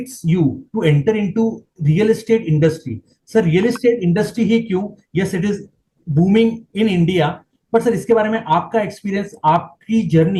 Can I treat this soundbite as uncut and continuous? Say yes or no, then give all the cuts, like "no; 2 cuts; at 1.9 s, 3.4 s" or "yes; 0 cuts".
yes; 0 cuts